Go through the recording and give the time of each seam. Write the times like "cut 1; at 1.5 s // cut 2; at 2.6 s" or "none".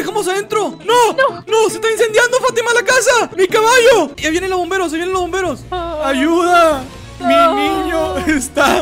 cut 1; at 3.3 s // cut 2; at 4.2 s